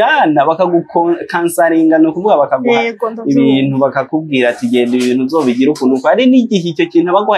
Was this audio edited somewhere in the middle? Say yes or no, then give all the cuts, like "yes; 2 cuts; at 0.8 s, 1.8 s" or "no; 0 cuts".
no; 0 cuts